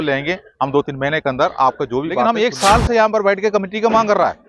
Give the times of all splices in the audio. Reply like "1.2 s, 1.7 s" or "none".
2.2 s